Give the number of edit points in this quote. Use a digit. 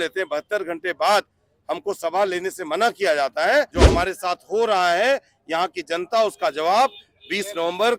1